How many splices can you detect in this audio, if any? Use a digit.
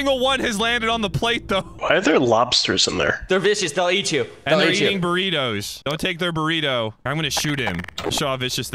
1